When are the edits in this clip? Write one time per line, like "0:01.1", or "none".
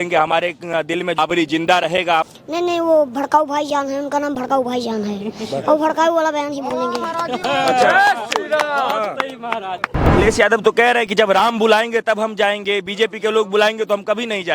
0:01.2
0:02.3
0:10.1